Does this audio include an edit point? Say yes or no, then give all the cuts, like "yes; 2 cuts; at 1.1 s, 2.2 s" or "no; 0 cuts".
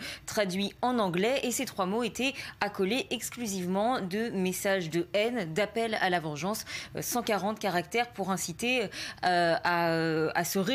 no; 0 cuts